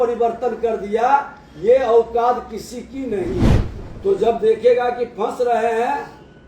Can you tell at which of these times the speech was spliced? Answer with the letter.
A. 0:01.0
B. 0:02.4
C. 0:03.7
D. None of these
C